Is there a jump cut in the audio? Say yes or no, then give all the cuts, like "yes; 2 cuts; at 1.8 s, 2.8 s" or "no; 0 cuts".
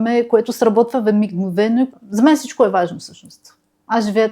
yes; 1 cut; at 1.9 s